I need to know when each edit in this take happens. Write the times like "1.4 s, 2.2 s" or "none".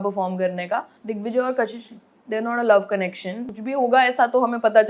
1.0 s, 3.4 s